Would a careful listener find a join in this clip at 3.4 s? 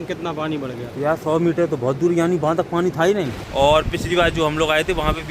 yes; 1 cut; at 3.4 s

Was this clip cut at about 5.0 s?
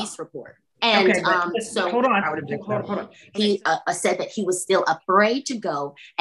no; 1 cut; at 3.2 s

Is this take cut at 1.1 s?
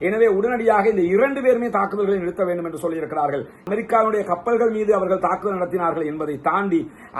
no; 1 cut; at 3.6 s

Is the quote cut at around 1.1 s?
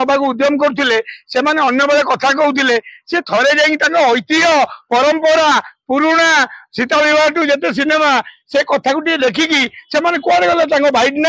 no; 0 cuts

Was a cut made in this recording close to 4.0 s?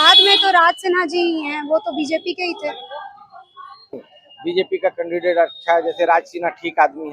yes; 1 cut; at 4.0 s

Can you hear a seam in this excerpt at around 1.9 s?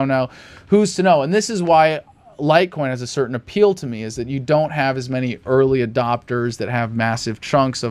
no; 0 cuts

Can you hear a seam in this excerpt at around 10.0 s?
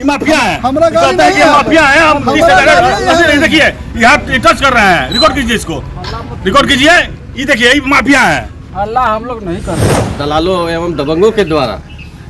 yes; 1 cut; at 10.0 s

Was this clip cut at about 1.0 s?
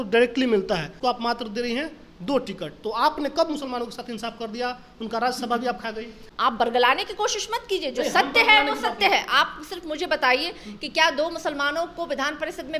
yes; 2 cuts; at 1.0 s, 6.2 s

